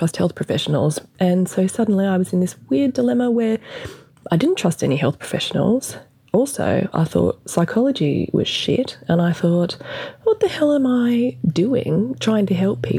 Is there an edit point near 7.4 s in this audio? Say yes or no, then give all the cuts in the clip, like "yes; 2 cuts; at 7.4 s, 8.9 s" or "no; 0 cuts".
no; 1 cut; at 1.1 s